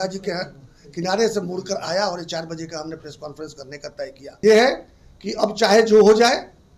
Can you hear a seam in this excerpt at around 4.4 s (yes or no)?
yes